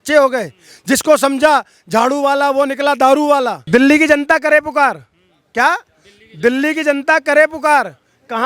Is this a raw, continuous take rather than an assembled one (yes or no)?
no